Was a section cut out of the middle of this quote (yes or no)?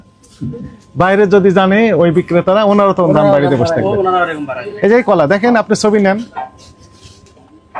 no